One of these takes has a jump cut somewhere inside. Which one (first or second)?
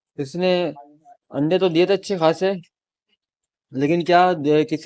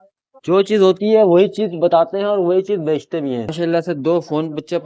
second